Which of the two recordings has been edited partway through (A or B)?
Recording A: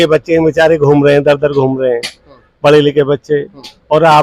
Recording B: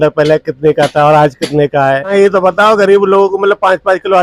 B